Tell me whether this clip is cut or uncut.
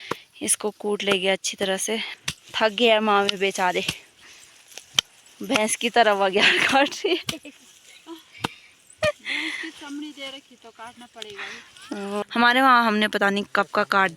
cut